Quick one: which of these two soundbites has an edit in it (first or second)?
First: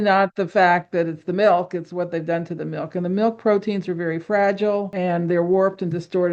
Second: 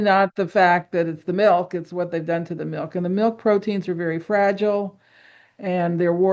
first